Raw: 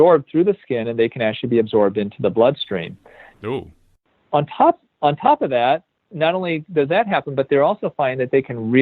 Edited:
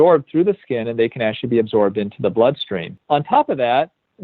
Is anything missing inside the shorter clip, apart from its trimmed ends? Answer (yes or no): yes